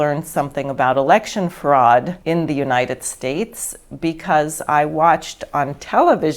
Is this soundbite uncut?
no; 1 cut; at 2.1 s

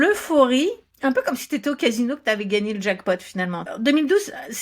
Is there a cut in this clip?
yes; 1 cut; at 3.7 s

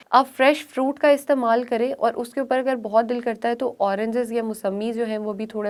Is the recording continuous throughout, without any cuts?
yes; 0 cuts

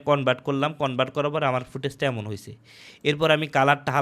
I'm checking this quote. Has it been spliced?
no; 0 cuts

